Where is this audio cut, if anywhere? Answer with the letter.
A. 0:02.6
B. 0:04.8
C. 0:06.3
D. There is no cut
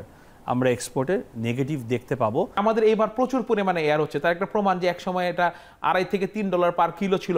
A